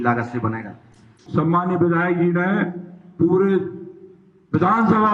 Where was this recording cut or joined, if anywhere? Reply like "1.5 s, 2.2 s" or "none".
1.2 s